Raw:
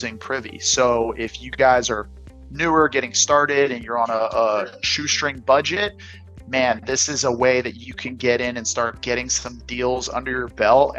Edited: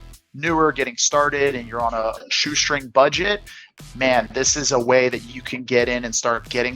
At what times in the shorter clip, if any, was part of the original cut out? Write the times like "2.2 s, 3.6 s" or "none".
2.2 s